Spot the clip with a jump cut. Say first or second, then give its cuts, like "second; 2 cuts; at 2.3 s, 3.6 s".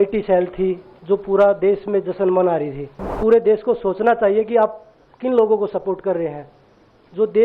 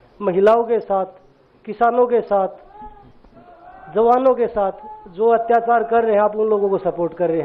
first; 2 cuts; at 0.9 s, 3.2 s